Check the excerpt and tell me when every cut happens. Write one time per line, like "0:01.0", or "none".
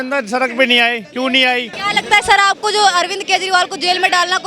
0:01.8